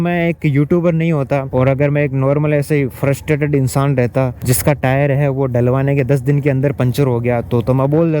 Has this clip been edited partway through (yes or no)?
yes